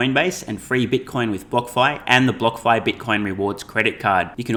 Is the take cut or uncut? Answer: uncut